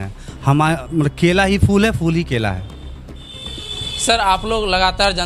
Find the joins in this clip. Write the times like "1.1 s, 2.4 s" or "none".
none